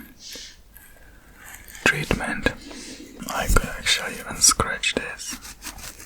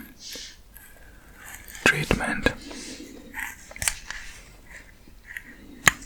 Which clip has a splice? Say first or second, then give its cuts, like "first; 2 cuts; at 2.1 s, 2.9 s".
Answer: first; 1 cut; at 3.2 s